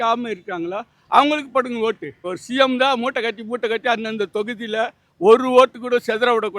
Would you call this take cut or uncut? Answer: cut